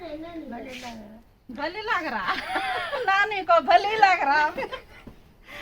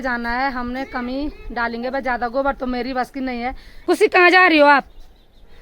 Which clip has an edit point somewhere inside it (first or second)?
second